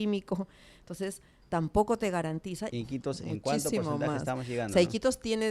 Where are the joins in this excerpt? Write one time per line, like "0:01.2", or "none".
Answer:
0:02.7